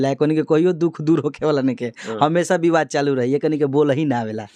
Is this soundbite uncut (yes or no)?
yes